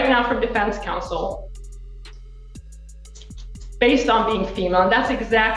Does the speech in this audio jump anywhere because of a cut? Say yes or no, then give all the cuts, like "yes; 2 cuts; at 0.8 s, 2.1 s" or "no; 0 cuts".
yes; 2 cuts; at 2.0 s, 3.7 s